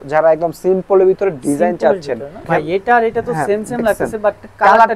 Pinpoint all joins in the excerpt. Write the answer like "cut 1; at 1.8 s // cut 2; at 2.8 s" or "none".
cut 1; at 2.5 s